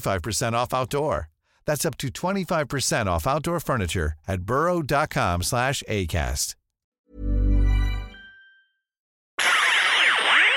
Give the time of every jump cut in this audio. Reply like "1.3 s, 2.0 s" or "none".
9.4 s